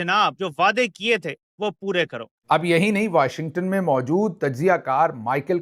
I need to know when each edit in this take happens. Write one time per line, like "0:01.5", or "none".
0:02.3